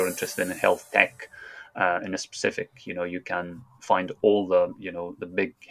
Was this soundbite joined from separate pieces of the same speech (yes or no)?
no